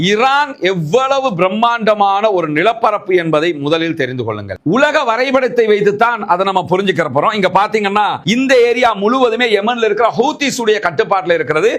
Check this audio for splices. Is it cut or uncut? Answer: cut